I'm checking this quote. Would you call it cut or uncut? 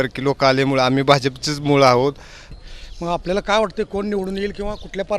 cut